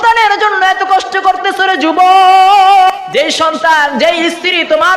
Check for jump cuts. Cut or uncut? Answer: cut